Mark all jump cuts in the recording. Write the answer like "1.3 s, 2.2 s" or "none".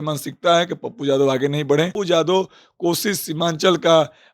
1.9 s